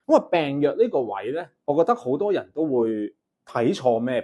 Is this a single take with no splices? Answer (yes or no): yes